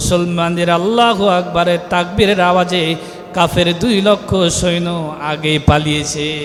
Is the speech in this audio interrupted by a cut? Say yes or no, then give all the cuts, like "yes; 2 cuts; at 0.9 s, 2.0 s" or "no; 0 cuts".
no; 0 cuts